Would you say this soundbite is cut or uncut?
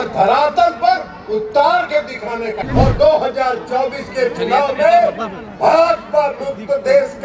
cut